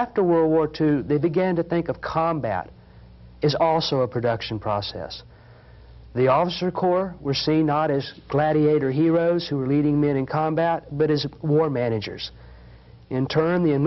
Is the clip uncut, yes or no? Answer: yes